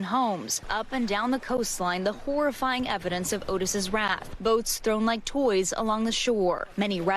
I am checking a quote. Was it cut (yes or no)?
yes